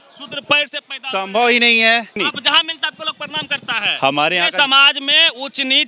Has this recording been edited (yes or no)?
yes